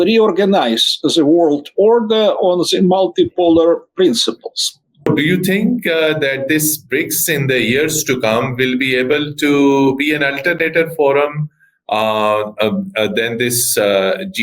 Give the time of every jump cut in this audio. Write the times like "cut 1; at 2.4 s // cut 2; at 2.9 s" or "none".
cut 1; at 5.1 s